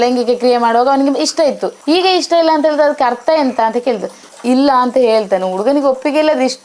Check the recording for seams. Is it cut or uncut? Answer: cut